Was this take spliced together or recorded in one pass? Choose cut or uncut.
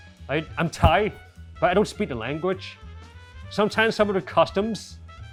uncut